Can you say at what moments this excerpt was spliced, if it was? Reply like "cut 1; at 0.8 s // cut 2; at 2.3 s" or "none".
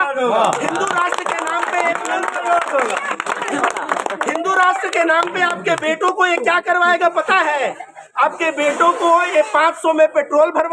none

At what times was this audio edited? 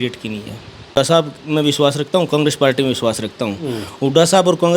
cut 1; at 0.9 s

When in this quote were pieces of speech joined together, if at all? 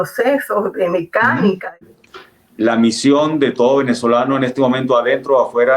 cut 1; at 1.8 s

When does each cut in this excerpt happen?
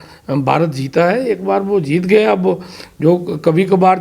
none

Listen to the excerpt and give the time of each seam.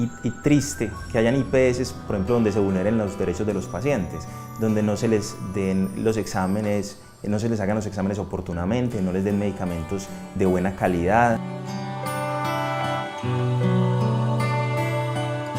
cut 1; at 9.0 s

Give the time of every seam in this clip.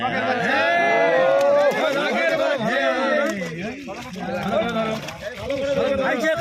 none

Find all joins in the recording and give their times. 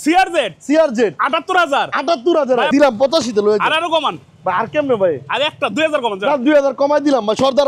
cut 1; at 2.7 s

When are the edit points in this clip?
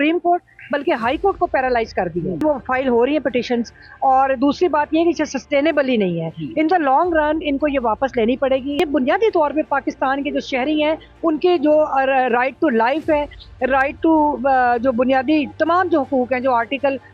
cut 1; at 2.4 s // cut 2; at 8.8 s

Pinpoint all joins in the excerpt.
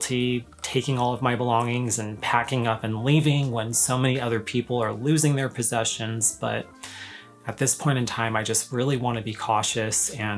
none

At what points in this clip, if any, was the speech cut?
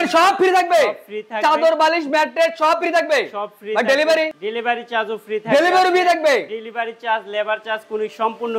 cut 1; at 4.4 s

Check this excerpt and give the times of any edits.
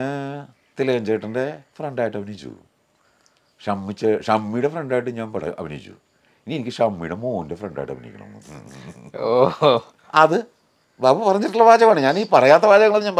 none

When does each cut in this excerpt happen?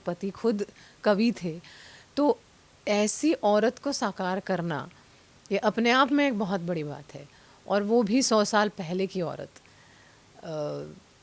none

